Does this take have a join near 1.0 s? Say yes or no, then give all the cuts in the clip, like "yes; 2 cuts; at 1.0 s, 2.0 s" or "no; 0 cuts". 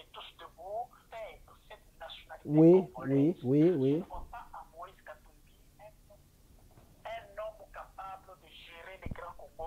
yes; 1 cut; at 1.0 s